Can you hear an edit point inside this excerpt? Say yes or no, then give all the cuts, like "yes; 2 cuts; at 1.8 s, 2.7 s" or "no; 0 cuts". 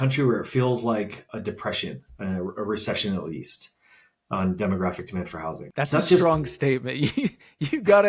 yes; 2 cuts; at 1.3 s, 5.6 s